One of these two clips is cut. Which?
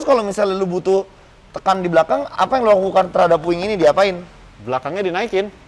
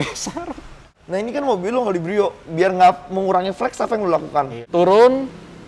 second; 2 cuts; at 0.9 s, 4.6 s

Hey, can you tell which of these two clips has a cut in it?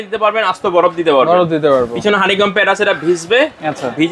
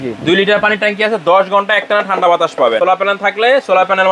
second; 1 cut; at 2.8 s

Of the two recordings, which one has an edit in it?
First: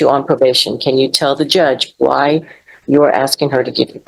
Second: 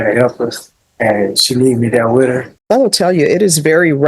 second; 1 cut; at 2.5 s

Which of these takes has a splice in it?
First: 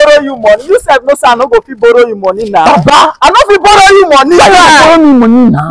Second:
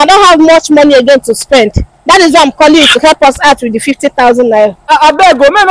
second; 1 cut; at 4.8 s

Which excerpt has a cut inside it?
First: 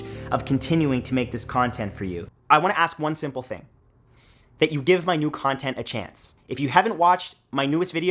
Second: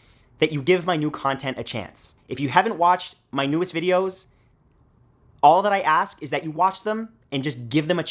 first; 1 cut; at 2.2 s

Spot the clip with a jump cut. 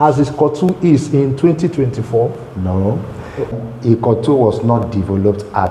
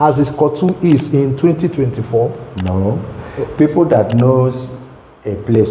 first; 1 cut; at 3.5 s

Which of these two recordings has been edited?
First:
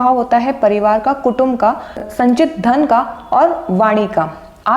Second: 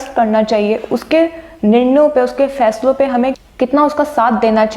first; 1 cut; at 2.1 s

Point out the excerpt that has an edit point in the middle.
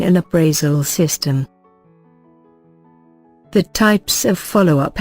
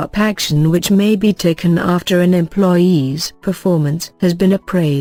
first; 2 cuts; at 1.5 s, 3.5 s

